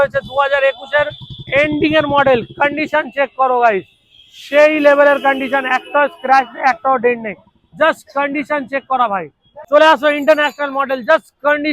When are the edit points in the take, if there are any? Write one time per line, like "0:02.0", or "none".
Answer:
0:09.5